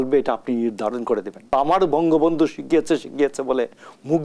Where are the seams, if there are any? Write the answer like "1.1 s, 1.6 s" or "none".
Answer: 1.5 s